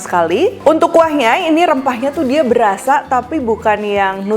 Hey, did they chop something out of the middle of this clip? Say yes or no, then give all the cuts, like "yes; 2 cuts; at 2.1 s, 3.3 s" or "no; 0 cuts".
no; 0 cuts